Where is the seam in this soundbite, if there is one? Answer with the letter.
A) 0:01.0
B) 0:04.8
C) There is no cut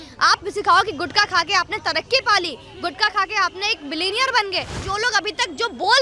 B